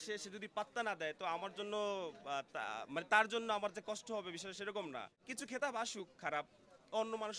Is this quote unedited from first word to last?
no; 1 cut; at 5.6 s

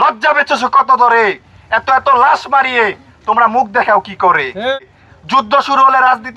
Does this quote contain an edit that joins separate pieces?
yes; 1 cut; at 4.8 s

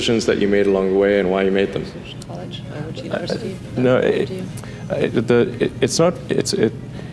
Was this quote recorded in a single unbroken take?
no; 1 cut; at 2.2 s

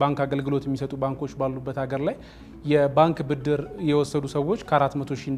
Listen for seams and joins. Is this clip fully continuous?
yes; 0 cuts

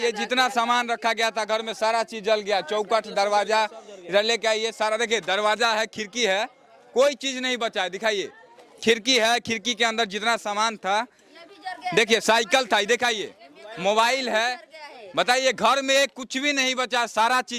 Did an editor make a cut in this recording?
no; 0 cuts

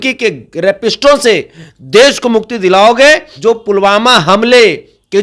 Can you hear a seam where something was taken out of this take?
yes; 1 cut; at 3.3 s

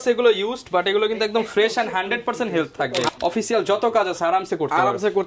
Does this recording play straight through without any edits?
no; 1 cut; at 3.1 s

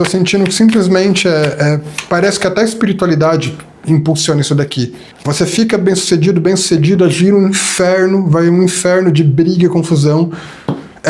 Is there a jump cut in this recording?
yes; 1 cut; at 5.1 s

